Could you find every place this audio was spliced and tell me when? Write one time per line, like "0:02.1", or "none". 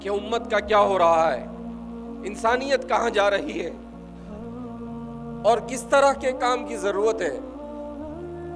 0:03.7
0:05.1
0:07.4